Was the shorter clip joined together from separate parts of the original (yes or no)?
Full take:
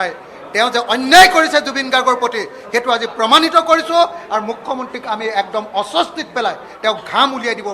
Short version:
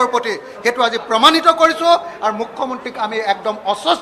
no